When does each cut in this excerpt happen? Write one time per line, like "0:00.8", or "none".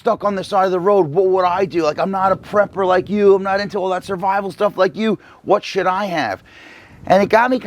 none

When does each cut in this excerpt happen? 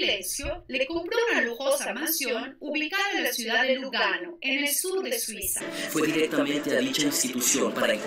0:05.7

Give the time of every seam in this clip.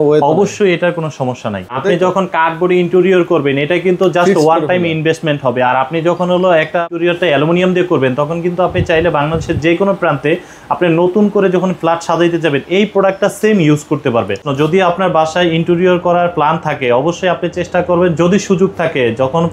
0:01.8
0:06.9
0:14.5

